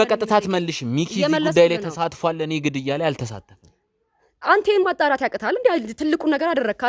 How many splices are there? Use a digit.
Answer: 0